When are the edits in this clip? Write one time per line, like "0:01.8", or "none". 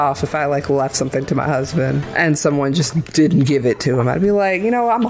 0:02.1